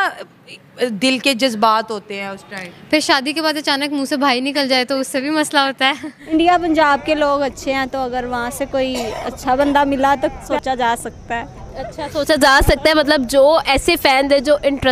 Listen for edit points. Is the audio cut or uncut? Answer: cut